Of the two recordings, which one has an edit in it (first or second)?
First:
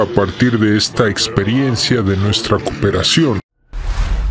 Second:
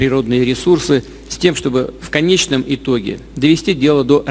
first